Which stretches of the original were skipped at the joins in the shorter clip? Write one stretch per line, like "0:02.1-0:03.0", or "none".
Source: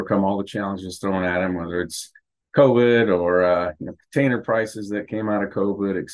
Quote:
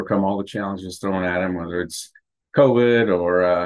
none